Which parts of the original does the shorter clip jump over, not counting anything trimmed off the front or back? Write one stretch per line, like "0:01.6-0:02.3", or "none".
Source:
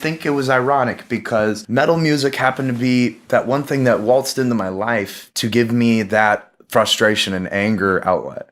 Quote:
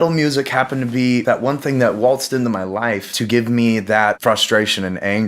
0:03.1-0:03.3
0:05.2-0:05.3
0:06.4-0:06.7